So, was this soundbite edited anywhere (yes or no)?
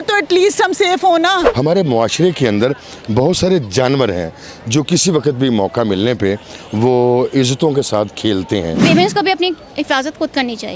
yes